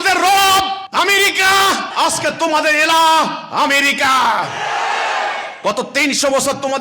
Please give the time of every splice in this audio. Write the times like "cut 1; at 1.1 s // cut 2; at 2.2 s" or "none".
cut 1; at 0.8 s // cut 2; at 1.9 s